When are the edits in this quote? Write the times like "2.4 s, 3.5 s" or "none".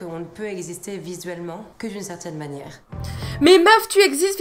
1.7 s